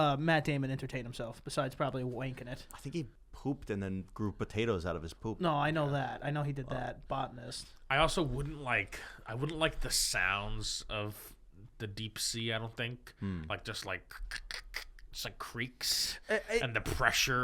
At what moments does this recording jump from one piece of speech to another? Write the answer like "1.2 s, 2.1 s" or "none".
none